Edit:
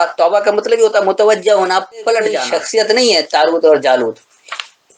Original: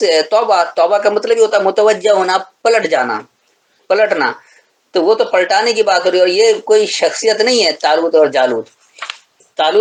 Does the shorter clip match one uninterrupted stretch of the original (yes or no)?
no